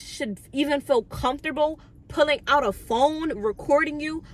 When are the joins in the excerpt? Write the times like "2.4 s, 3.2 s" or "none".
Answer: none